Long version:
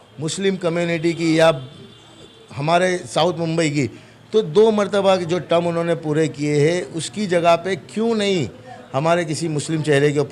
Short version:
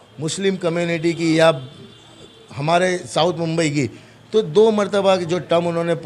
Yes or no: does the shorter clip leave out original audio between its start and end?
no